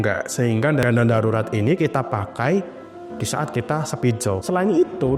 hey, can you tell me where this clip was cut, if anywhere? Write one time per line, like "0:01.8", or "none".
none